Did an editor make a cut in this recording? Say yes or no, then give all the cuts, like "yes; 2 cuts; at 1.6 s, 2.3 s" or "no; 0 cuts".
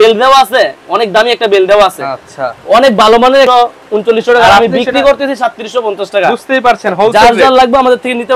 yes; 1 cut; at 3.5 s